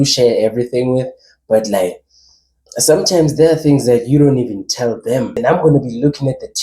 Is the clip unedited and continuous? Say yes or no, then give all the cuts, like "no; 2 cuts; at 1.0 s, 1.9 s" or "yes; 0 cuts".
no; 1 cut; at 5.4 s